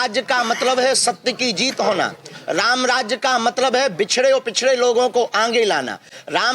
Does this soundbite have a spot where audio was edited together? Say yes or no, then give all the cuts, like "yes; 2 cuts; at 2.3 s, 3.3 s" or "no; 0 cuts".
no; 0 cuts